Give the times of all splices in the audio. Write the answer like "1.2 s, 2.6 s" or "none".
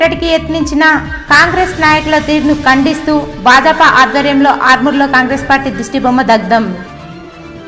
none